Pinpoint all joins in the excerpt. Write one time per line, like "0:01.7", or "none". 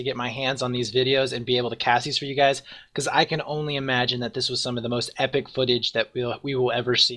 0:01.4